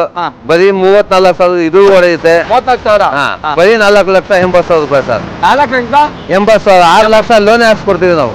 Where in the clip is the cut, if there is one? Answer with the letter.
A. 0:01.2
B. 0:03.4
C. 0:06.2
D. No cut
B